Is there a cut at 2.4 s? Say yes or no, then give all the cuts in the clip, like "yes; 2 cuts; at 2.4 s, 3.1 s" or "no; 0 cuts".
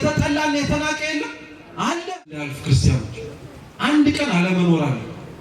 yes; 1 cut; at 2.4 s